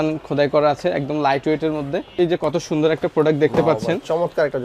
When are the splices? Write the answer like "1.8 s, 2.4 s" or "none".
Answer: 2.2 s